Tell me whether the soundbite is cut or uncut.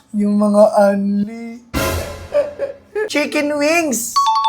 cut